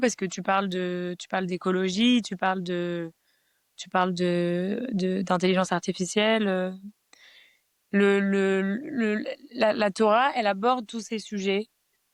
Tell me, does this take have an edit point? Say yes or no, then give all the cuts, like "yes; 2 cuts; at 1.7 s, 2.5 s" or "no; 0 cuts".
no; 0 cuts